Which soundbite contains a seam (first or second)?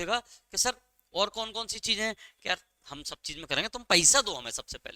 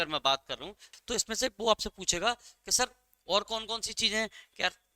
second